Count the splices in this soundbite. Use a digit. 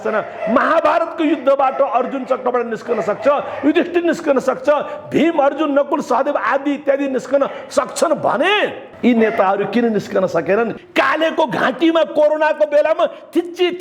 2